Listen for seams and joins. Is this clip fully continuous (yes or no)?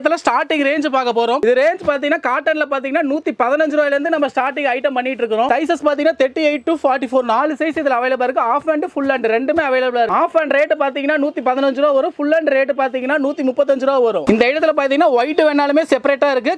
yes